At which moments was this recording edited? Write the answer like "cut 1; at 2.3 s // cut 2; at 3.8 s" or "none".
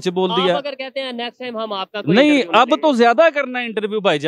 none